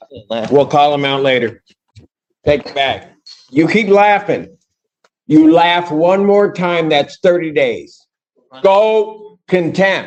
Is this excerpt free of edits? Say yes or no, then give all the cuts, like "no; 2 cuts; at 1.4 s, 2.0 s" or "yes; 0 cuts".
yes; 0 cuts